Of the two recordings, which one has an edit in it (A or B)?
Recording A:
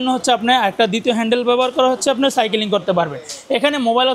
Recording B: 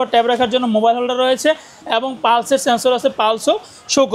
B